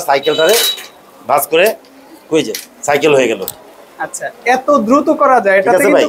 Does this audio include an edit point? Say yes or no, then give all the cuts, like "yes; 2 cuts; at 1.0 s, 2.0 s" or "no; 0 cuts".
no; 0 cuts